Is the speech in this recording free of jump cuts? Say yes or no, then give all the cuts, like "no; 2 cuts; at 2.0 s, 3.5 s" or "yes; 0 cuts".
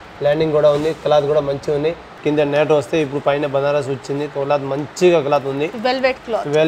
no; 1 cut; at 2.2 s